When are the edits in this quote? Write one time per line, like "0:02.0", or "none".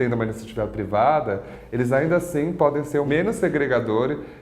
0:03.1